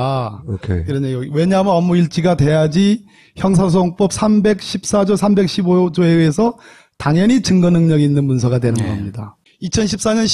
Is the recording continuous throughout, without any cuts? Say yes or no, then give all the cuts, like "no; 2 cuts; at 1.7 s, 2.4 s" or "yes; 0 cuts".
yes; 0 cuts